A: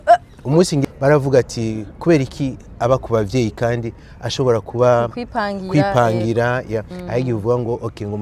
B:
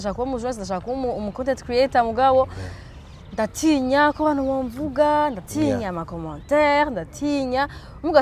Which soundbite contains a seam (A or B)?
A